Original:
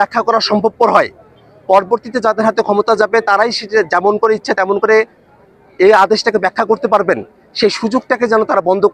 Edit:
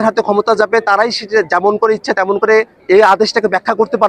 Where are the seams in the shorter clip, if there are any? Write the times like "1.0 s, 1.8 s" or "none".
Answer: 2.7 s